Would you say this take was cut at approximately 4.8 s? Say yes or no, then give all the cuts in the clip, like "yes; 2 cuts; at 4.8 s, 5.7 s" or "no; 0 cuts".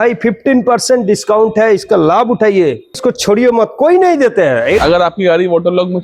yes; 1 cut; at 4.8 s